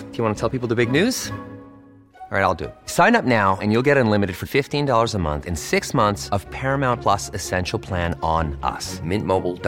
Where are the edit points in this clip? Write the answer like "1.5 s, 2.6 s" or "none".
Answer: none